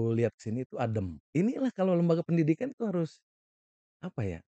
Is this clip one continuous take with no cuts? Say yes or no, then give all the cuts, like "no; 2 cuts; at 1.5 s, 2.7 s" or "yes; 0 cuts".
no; 1 cut; at 1.2 s